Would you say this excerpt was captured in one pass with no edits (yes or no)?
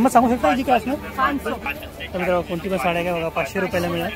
no